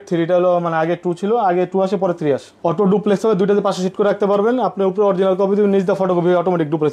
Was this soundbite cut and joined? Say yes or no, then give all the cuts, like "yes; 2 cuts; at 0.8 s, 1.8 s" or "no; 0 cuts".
yes; 1 cut; at 2.5 s